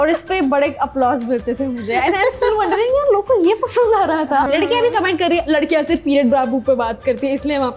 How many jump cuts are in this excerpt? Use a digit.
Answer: 1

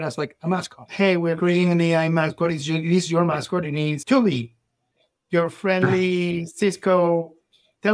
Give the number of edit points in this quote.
1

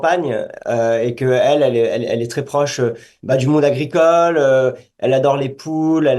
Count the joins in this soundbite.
1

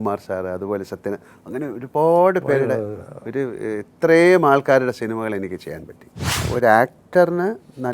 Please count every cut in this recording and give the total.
1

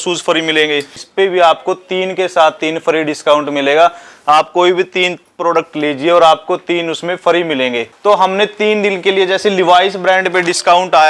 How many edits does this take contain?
2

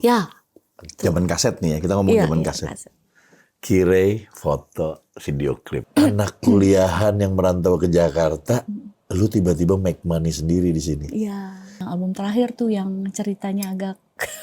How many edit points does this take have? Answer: 2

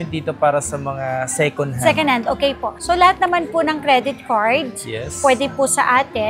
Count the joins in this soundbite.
0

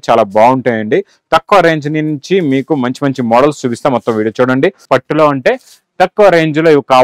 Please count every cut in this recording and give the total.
1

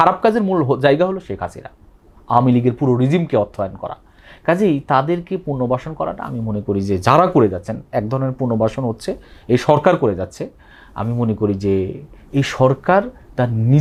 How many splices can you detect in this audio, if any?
0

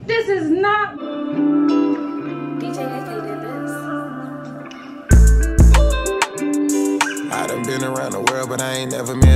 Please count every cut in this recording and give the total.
1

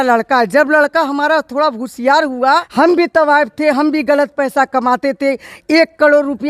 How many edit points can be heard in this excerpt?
1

